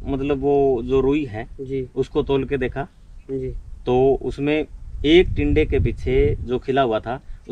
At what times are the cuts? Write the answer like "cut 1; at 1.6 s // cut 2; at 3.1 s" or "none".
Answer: none